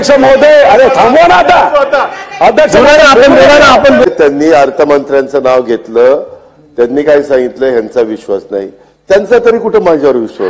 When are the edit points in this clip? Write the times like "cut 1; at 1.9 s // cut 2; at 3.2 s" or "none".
cut 1; at 4.1 s